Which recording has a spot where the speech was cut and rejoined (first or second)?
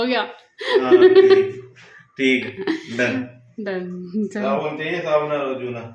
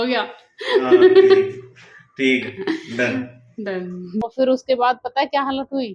second